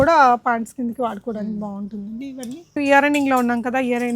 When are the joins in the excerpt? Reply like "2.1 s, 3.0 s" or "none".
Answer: 2.8 s